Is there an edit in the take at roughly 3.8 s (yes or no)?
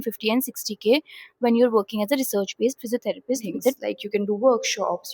yes